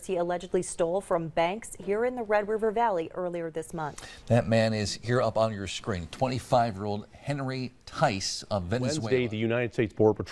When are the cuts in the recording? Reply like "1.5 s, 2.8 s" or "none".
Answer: 9.0 s